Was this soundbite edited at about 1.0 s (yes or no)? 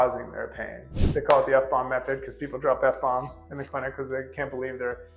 yes